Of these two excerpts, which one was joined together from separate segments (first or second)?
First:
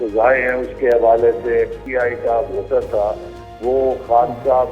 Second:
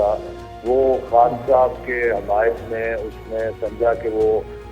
first